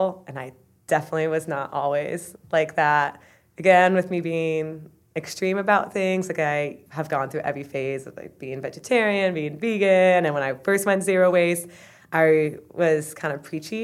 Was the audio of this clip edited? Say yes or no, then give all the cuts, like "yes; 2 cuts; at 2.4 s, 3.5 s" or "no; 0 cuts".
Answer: yes; 2 cuts; at 2.3 s, 6.8 s